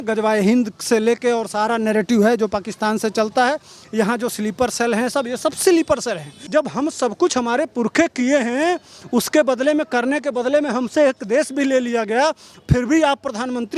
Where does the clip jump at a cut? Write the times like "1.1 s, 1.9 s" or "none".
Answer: 6.3 s